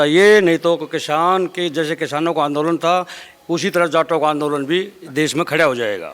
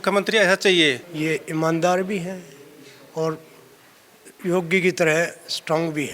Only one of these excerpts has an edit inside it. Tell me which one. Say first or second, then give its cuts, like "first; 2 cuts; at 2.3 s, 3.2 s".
second; 1 cut; at 1.1 s